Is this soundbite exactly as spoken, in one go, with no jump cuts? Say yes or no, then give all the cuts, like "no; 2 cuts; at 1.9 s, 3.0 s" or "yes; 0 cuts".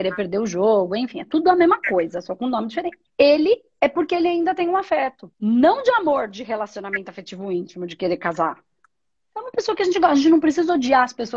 no; 2 cuts; at 3.0 s, 5.2 s